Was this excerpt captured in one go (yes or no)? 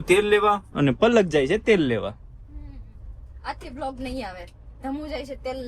yes